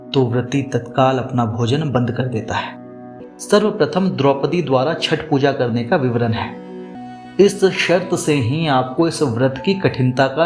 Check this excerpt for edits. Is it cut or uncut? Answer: cut